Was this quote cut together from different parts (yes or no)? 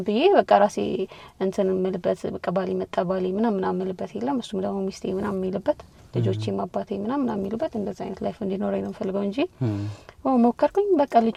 no